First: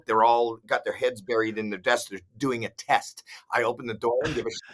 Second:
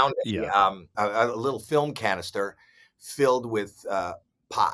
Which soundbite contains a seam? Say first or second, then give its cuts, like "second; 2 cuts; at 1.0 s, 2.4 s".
second; 1 cut; at 0.9 s